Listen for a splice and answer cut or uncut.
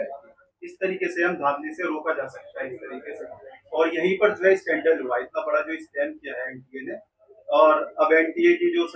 uncut